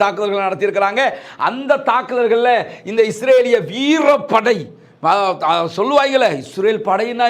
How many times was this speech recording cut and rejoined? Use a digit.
0